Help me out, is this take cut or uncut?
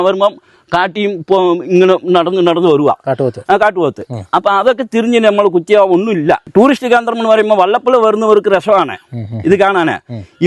cut